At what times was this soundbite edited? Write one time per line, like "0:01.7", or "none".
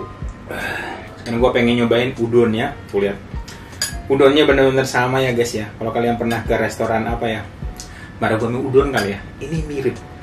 0:01.1